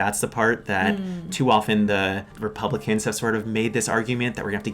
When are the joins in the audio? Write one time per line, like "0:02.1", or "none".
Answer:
0:02.3